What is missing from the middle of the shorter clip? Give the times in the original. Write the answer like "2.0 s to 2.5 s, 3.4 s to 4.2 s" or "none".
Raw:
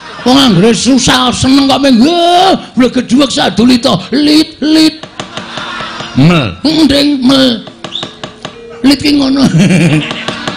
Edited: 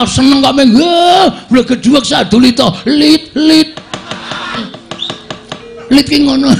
6.0 s to 7.7 s